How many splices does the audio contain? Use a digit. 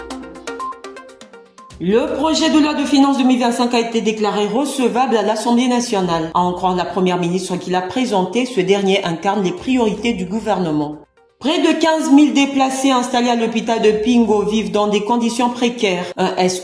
1